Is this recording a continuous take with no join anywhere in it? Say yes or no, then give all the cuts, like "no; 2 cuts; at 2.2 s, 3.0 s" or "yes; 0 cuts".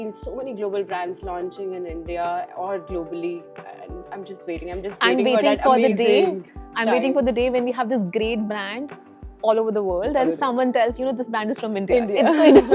yes; 0 cuts